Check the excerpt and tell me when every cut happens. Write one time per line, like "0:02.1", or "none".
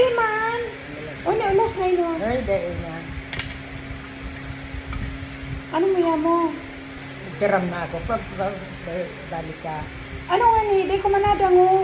none